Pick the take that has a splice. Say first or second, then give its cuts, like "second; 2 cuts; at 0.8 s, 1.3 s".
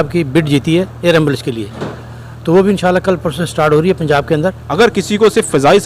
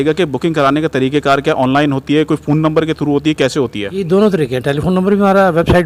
first; 1 cut; at 4.6 s